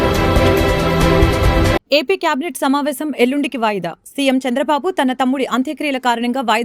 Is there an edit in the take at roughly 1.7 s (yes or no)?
yes